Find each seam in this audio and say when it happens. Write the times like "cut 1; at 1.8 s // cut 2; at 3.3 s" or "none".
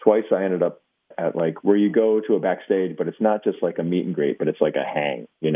cut 1; at 1.1 s